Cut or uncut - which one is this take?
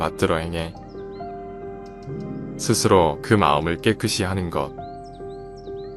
cut